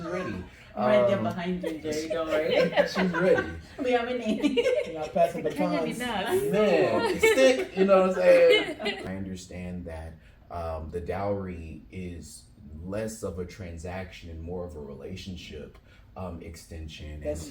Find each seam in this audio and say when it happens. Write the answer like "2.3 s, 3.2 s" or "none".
9.0 s